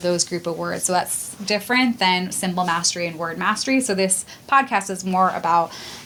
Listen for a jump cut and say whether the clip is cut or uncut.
uncut